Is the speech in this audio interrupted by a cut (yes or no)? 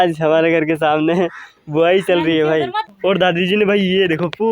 yes